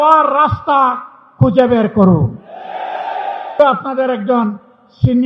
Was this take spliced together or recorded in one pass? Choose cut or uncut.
cut